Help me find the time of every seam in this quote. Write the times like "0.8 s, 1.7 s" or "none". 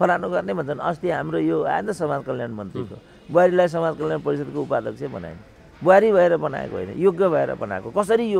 none